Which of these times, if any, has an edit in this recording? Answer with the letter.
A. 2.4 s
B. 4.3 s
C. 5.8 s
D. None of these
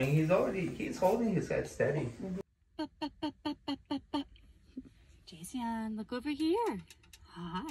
A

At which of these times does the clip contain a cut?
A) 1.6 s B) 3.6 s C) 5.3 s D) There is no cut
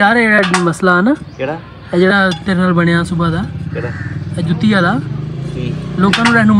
D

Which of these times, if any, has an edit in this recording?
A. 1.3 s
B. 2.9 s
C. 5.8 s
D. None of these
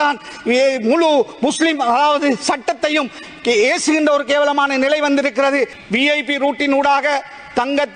C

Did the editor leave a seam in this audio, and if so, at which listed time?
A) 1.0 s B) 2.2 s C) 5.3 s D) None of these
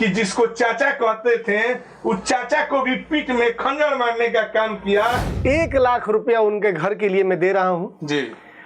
C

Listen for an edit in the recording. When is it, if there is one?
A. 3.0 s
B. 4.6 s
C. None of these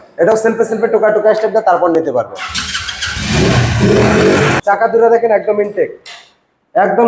B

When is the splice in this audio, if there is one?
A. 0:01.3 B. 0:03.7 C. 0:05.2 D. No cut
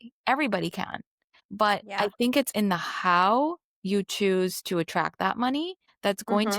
A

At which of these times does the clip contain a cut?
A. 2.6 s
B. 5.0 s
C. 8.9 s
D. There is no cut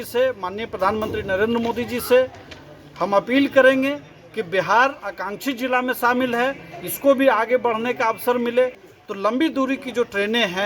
C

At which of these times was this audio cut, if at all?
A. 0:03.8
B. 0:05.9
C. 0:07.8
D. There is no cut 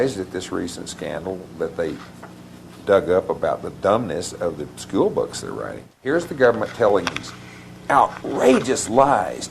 B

